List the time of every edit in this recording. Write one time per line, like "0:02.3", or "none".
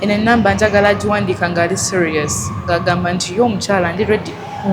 none